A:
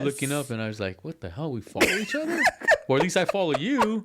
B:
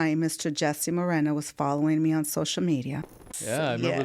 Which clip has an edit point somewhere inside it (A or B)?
B